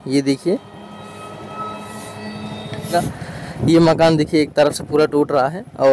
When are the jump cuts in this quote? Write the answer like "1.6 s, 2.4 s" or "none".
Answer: 2.9 s